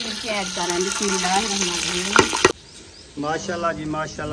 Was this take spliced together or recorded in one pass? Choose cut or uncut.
cut